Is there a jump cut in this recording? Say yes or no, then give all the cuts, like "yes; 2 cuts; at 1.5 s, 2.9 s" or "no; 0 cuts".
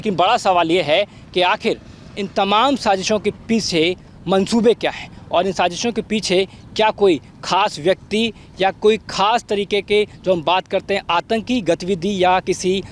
no; 0 cuts